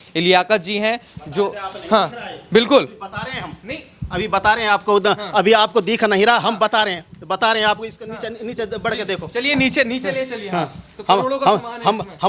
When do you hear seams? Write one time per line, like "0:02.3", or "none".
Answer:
none